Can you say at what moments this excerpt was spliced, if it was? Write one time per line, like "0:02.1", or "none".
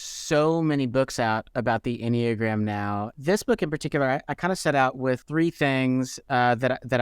0:03.1
0:05.2